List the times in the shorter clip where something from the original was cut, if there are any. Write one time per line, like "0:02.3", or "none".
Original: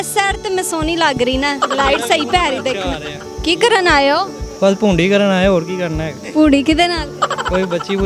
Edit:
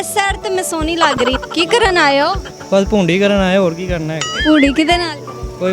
0:01.4

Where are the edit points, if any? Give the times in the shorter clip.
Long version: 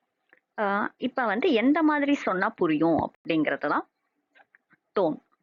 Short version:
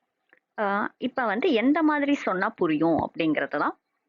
0:03.1

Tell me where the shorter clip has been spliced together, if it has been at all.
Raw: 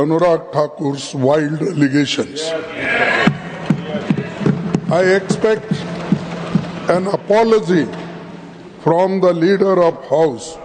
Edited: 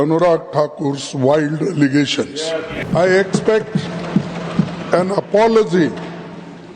0:02.9

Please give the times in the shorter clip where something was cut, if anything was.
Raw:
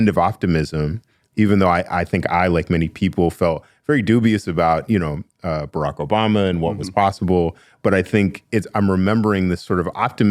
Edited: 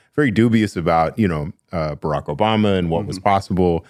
none

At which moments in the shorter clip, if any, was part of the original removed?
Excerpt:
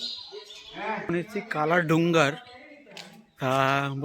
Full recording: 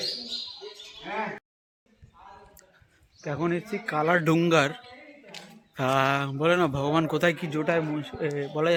0:01.1

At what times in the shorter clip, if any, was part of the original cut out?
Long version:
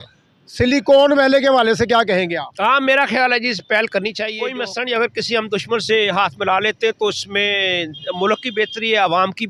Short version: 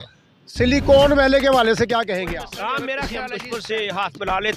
0:03.3

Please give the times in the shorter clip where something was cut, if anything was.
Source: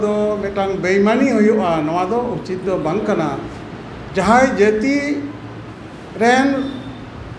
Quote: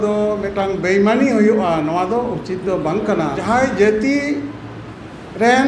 0:03.4

